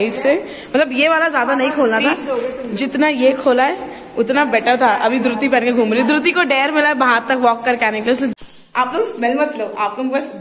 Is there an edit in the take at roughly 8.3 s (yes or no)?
yes